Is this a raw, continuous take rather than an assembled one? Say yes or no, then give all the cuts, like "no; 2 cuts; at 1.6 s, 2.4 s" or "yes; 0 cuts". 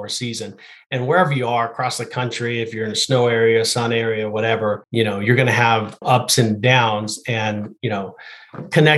no; 2 cuts; at 4.8 s, 6.0 s